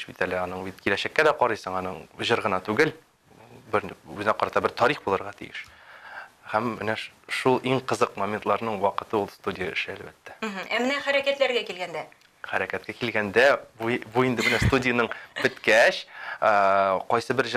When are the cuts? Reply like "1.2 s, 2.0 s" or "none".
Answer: none